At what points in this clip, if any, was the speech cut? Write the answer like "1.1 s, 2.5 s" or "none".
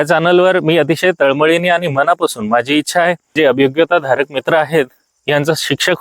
3.3 s